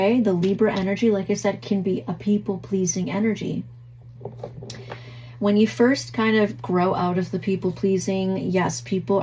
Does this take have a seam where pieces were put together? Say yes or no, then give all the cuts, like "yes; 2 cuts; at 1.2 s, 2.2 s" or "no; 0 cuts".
no; 0 cuts